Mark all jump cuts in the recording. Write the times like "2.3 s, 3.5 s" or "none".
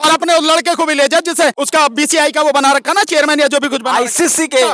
1.6 s